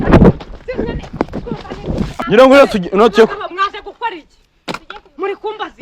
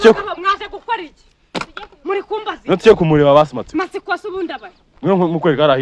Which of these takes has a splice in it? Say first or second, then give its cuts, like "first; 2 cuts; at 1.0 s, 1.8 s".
first; 1 cut; at 2.2 s